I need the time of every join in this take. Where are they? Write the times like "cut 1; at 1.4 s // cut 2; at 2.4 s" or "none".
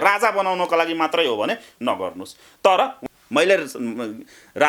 cut 1; at 3.0 s